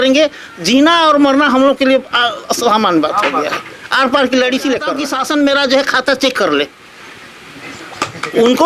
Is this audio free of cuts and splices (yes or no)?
no